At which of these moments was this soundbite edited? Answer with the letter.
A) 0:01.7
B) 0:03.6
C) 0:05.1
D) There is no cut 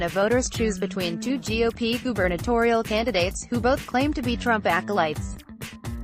C